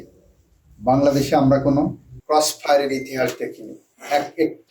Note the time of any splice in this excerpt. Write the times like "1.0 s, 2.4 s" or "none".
2.1 s